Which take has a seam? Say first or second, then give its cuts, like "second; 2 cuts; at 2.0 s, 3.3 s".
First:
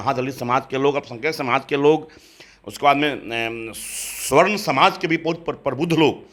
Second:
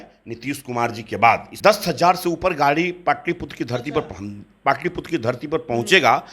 second; 1 cut; at 1.5 s